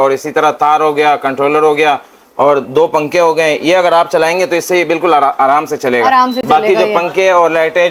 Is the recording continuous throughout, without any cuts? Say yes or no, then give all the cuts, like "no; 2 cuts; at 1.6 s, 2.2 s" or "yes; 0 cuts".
yes; 0 cuts